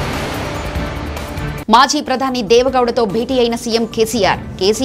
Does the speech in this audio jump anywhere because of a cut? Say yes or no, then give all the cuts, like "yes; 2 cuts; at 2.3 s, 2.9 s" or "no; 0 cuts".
no; 0 cuts